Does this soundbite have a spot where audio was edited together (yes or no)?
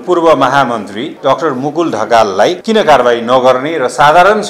yes